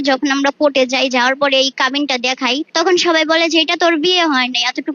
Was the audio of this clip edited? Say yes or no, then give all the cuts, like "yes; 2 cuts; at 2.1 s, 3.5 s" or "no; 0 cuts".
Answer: yes; 1 cut; at 2.7 s